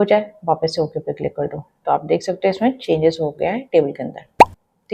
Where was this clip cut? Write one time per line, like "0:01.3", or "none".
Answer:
none